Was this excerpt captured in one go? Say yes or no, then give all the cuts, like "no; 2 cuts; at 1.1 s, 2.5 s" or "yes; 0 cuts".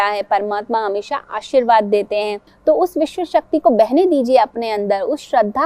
no; 1 cut; at 2.4 s